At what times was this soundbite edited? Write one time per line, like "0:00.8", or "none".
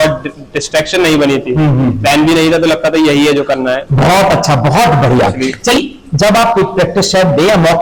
0:05.8